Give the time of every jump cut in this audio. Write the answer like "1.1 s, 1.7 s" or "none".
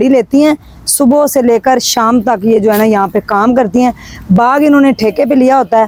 none